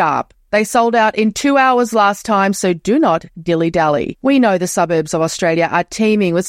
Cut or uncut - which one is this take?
uncut